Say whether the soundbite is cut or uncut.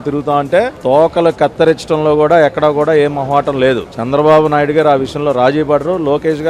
uncut